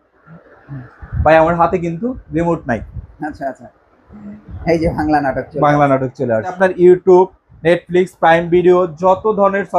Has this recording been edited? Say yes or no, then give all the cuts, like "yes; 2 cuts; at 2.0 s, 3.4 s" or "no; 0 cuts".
no; 0 cuts